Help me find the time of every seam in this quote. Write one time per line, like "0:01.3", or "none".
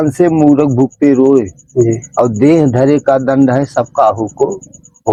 none